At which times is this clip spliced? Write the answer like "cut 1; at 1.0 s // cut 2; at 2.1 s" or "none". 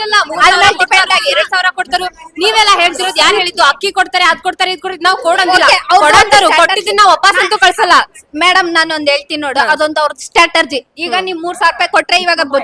none